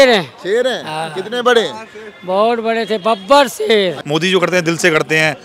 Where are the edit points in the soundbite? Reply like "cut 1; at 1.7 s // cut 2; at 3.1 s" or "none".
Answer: cut 1; at 4.0 s